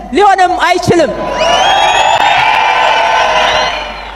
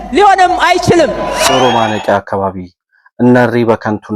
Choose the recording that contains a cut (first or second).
second